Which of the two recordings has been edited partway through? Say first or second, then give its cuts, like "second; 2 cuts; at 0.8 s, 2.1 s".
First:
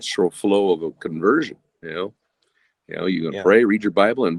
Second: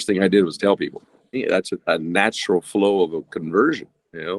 second; 1 cut; at 1.4 s